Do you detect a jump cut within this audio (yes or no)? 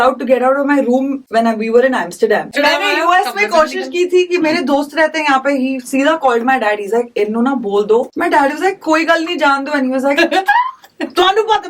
yes